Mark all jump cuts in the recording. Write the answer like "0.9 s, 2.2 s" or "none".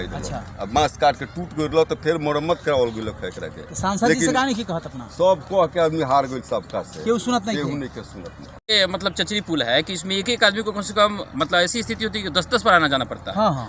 8.7 s